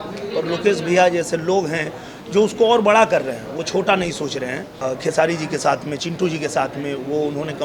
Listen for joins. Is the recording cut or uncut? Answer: cut